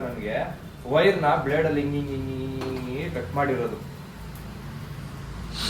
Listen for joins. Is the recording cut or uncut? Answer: uncut